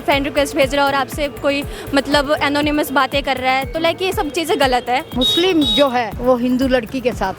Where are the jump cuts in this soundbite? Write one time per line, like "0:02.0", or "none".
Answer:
0:05.1
0:06.1